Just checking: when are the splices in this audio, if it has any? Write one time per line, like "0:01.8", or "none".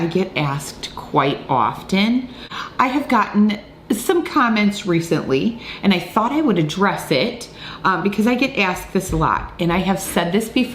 0:02.5